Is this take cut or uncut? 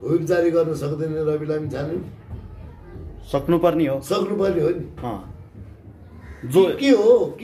uncut